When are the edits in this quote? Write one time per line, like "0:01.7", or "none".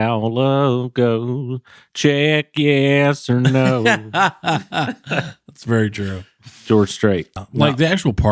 0:07.4